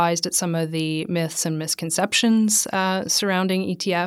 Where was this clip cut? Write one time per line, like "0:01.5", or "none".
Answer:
none